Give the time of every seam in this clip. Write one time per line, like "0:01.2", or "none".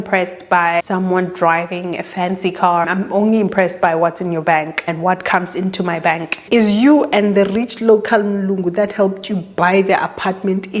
0:00.8
0:02.8
0:04.8
0:06.4

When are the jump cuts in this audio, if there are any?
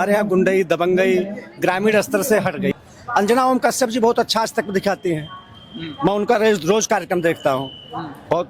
0:02.7

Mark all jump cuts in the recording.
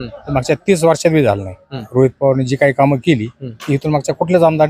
0:01.9

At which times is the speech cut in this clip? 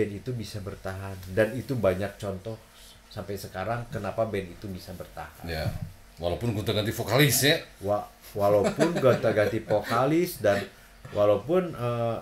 none

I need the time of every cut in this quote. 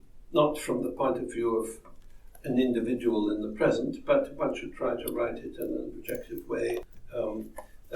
0:07.0

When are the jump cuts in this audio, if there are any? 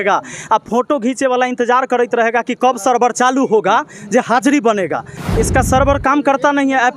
0:05.1

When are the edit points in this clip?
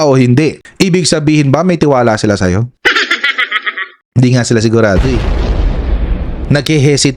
0:02.7

